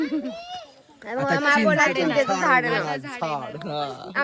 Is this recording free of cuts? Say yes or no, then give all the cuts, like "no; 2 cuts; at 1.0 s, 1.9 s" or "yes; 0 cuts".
yes; 0 cuts